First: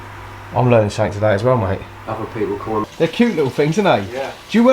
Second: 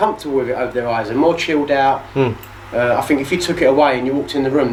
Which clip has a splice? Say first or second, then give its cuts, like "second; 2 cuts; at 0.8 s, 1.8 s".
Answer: first; 1 cut; at 2.9 s